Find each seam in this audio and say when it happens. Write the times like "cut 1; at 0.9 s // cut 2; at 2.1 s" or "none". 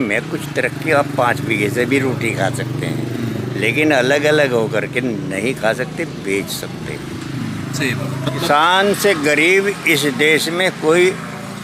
cut 1; at 8.4 s